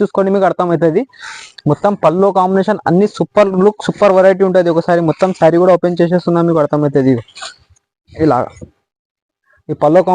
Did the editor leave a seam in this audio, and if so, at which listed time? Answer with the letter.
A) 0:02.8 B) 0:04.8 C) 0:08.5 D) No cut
D